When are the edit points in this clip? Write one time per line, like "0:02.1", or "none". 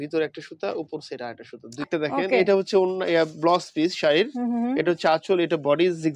0:01.8